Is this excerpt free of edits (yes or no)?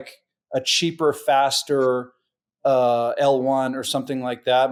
yes